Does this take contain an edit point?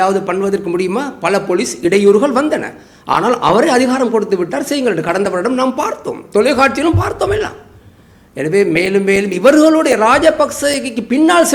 no; 0 cuts

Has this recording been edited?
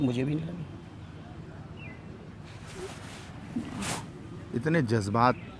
no; 0 cuts

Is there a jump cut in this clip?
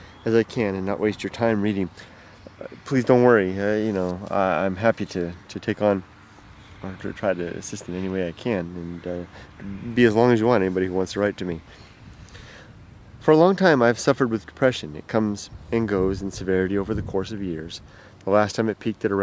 yes; 1 cut; at 5.8 s

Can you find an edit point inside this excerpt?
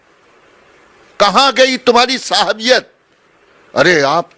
no; 0 cuts

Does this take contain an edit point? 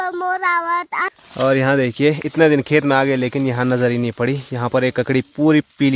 yes; 1 cut; at 1.2 s

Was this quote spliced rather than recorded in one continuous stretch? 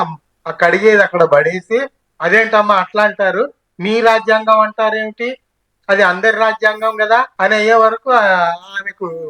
yes; 1 cut; at 7.3 s

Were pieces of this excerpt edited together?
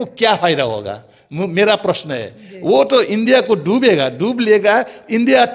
no; 0 cuts

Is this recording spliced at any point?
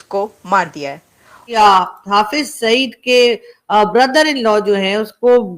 yes; 1 cut; at 1.5 s

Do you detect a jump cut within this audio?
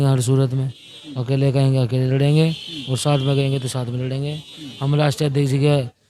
no; 0 cuts

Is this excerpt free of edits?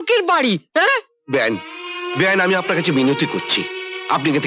yes; 0 cuts

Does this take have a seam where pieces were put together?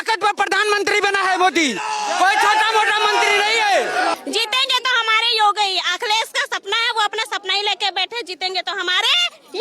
yes; 1 cut; at 4.1 s

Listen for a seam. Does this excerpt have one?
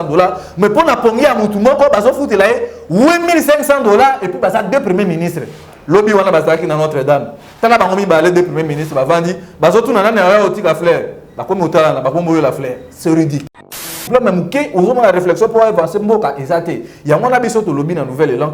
yes; 1 cut; at 14.0 s

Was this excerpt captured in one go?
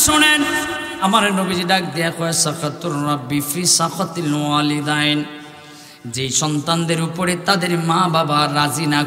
no; 1 cut; at 1.0 s

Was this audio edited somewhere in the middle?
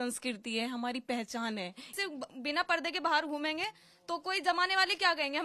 yes; 1 cut; at 1.9 s

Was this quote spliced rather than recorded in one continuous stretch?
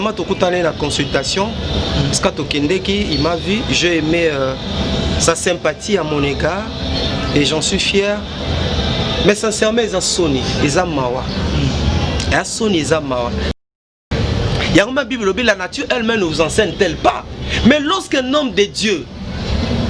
yes; 1 cut; at 13.5 s

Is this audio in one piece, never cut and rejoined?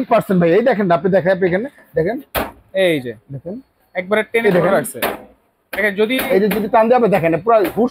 yes; 0 cuts

